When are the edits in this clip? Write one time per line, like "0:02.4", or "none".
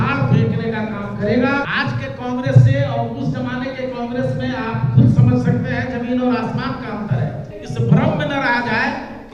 0:01.7
0:07.6